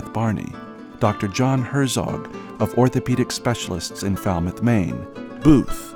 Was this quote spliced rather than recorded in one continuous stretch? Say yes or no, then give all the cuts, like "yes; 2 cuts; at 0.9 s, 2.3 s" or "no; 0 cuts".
no; 0 cuts